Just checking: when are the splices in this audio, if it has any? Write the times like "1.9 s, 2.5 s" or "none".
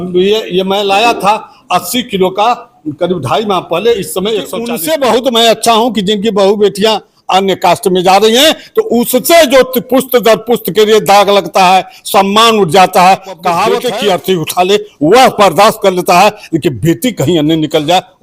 4.7 s, 13.8 s

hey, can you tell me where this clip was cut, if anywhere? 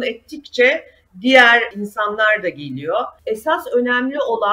3.1 s

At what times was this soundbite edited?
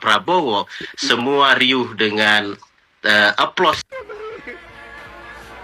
3.8 s

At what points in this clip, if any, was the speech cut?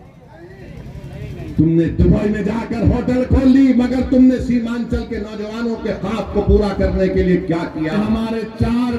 7.9 s

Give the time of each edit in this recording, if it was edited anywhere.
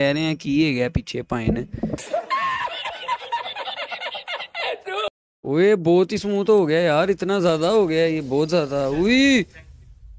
5.3 s

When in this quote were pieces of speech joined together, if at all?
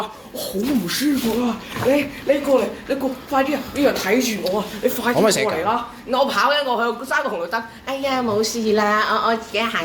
none

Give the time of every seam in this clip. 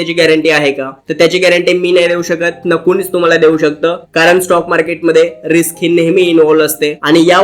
none

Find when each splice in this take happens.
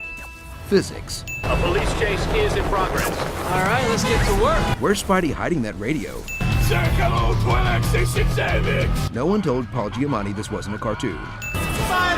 11.0 s

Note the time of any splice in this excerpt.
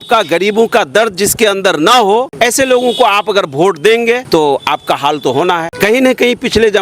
2.3 s, 4.2 s, 5.7 s

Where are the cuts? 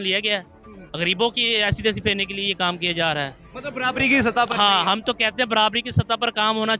none

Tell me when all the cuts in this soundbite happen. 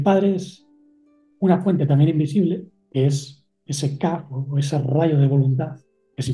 2.8 s

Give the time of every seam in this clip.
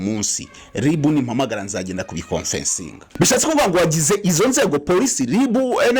3.0 s

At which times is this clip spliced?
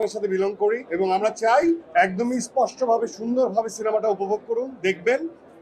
0.9 s, 1.8 s

